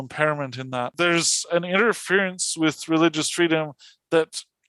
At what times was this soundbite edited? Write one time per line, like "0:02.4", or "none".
0:00.9